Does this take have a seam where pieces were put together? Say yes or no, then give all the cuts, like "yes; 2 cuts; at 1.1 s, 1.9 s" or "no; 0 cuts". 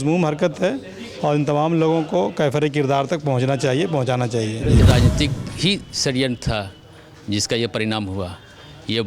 yes; 1 cut; at 4.8 s